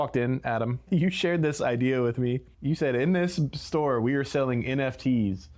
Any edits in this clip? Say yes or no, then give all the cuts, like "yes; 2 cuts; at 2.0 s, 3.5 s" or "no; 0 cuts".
yes; 2 cuts; at 0.8 s, 2.5 s